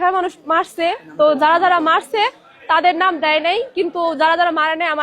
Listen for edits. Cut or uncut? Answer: uncut